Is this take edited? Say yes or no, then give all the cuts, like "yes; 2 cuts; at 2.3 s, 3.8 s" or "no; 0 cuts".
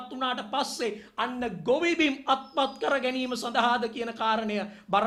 no; 0 cuts